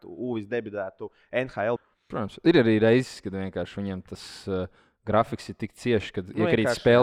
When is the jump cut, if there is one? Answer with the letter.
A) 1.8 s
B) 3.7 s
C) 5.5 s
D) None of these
A